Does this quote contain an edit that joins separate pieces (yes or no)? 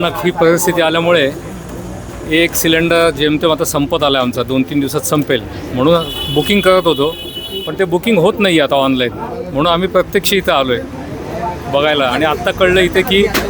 no